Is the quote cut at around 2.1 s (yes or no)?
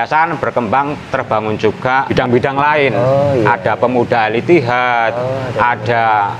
yes